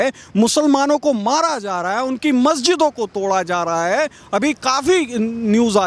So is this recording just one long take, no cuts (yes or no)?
yes